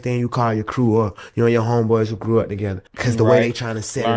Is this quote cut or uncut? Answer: uncut